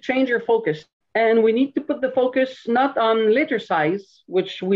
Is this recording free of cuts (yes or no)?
no